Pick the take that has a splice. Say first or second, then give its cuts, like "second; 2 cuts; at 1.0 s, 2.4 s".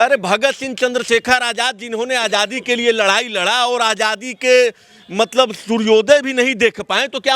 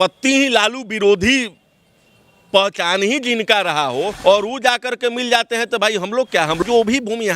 second; 2 cuts; at 4.1 s, 6.6 s